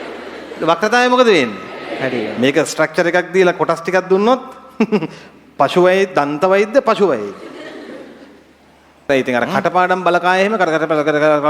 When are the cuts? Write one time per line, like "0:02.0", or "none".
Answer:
0:02.3
0:09.1